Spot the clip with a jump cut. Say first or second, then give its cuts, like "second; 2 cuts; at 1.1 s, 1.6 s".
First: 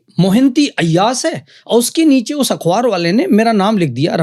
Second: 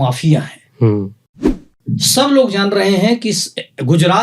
second; 1 cut; at 1.6 s